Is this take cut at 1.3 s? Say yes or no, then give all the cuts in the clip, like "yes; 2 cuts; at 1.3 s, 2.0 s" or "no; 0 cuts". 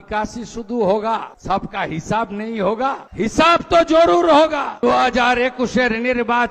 yes; 3 cuts; at 1.3 s, 3.1 s, 4.8 s